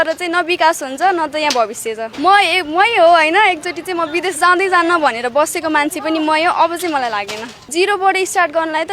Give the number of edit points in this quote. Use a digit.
2